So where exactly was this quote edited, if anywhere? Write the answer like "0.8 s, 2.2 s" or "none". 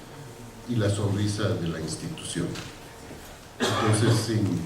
2.3 s